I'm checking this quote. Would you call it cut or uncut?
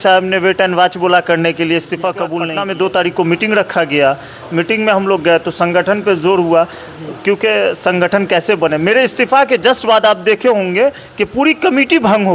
cut